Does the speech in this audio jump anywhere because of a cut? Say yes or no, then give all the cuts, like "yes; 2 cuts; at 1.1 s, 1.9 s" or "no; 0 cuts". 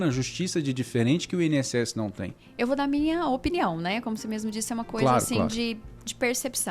no; 0 cuts